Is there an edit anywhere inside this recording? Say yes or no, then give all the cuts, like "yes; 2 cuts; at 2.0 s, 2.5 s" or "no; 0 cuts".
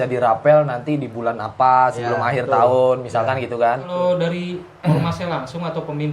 yes; 1 cut; at 3.9 s